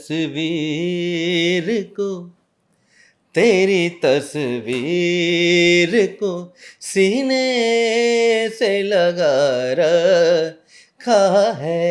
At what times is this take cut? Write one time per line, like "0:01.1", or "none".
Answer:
none